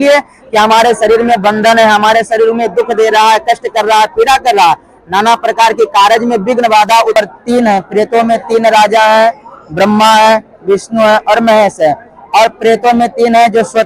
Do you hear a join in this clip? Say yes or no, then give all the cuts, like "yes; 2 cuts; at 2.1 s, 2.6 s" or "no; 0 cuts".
yes; 1 cut; at 7.1 s